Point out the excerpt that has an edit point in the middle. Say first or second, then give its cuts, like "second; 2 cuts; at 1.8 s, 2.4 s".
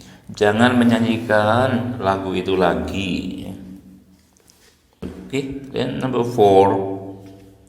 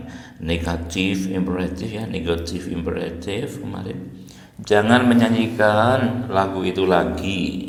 first; 1 cut; at 5.0 s